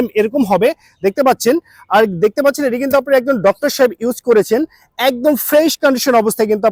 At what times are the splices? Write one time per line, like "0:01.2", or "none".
none